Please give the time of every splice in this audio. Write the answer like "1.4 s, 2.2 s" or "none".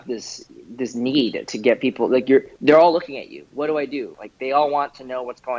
4.1 s